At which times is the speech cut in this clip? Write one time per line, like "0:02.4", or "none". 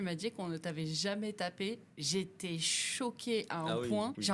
none